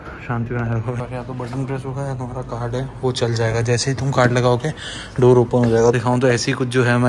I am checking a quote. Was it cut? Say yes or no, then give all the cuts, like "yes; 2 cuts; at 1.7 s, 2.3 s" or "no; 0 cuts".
yes; 2 cuts; at 1.0 s, 5.9 s